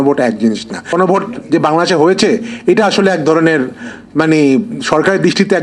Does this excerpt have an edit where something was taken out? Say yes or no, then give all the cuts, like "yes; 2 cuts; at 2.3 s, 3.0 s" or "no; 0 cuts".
yes; 1 cut; at 0.9 s